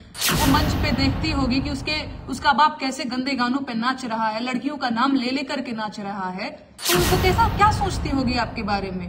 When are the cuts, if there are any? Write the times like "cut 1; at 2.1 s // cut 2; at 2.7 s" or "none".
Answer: cut 1; at 6.7 s